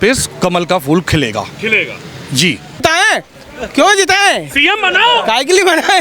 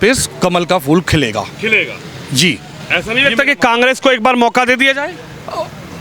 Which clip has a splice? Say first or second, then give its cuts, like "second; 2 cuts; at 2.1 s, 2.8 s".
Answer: first; 1 cut; at 2.8 s